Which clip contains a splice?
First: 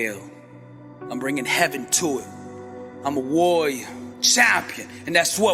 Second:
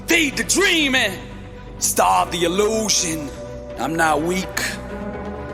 second; 1 cut; at 2.8 s

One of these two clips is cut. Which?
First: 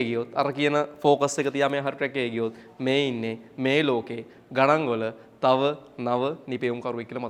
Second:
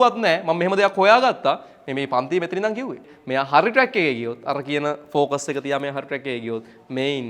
second; 1 cut; at 3.1 s

